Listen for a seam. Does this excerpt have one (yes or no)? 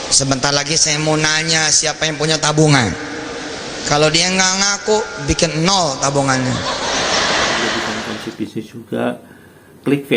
yes